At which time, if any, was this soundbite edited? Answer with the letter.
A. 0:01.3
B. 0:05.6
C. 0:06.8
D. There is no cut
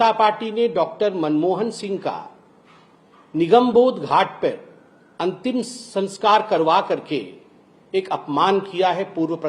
D